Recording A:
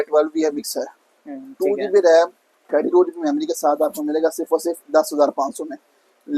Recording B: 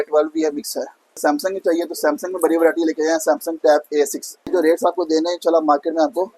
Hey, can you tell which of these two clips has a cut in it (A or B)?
B